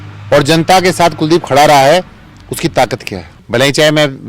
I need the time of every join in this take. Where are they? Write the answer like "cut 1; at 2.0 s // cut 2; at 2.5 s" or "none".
cut 1; at 3.3 s